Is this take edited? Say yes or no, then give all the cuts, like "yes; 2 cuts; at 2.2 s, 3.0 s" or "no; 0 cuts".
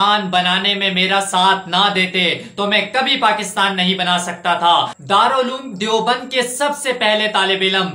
yes; 1 cut; at 5.0 s